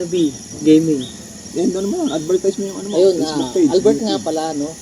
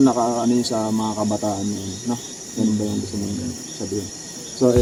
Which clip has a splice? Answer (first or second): first